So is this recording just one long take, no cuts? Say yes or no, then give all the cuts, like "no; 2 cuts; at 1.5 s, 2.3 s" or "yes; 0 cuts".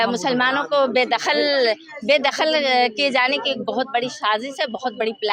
yes; 0 cuts